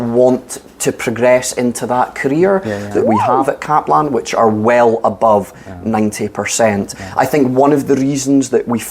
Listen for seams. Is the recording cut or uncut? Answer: cut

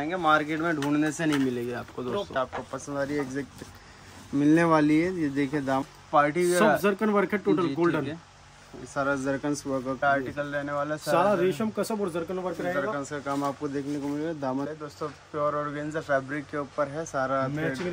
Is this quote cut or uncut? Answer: cut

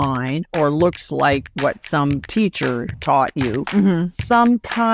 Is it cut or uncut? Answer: cut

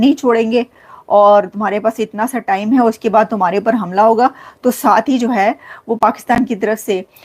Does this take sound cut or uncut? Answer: uncut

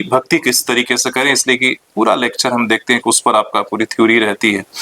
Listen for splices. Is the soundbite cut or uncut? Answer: uncut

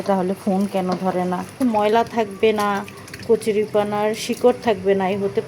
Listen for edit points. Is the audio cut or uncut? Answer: cut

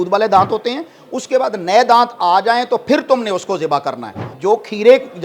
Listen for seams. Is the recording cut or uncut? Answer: cut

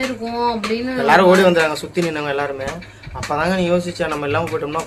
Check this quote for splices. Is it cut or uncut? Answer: uncut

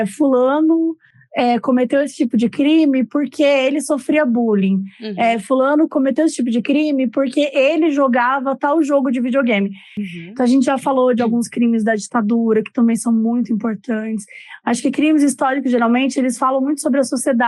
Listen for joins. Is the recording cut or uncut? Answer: cut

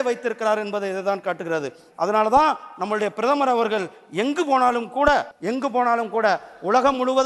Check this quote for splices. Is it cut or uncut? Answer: cut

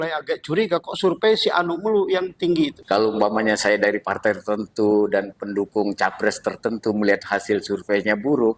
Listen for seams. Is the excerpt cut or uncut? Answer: cut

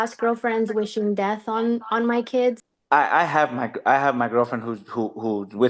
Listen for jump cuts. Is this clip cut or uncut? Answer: cut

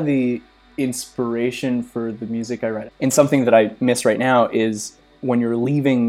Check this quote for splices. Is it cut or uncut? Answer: cut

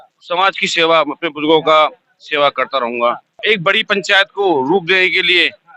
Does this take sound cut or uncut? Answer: cut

